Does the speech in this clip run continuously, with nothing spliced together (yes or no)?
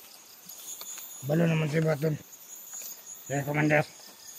yes